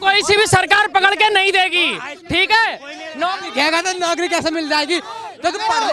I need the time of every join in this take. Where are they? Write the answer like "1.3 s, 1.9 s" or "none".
none